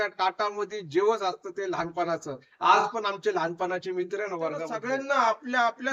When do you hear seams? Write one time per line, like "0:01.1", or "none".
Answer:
0:04.7